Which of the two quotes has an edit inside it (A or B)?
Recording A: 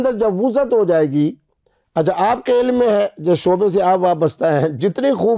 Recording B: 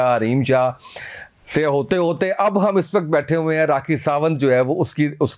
B